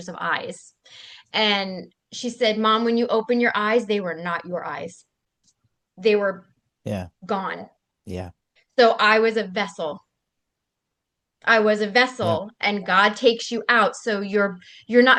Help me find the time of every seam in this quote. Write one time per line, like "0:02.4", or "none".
none